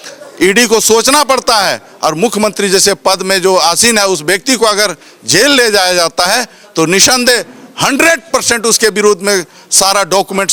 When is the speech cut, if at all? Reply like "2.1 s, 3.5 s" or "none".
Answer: none